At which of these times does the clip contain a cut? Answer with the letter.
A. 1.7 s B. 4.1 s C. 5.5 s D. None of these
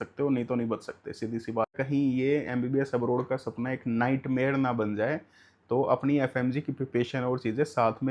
A